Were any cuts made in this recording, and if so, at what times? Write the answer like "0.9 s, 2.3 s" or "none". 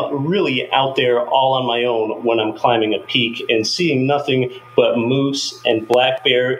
none